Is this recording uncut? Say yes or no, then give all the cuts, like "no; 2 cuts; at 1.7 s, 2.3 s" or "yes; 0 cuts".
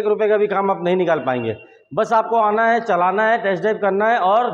yes; 0 cuts